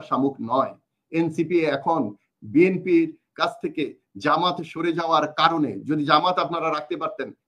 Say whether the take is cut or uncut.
uncut